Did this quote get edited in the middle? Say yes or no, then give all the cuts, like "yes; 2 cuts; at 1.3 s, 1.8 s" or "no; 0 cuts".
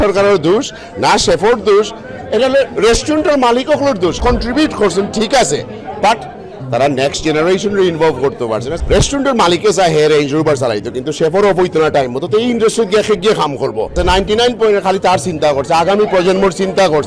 yes; 3 cuts; at 4.2 s, 8.7 s, 14.0 s